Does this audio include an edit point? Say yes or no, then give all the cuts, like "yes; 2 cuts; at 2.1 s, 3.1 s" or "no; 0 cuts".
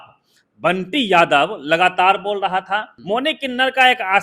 yes; 1 cut; at 2.9 s